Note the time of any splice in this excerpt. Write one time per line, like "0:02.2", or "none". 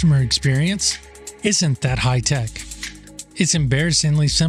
none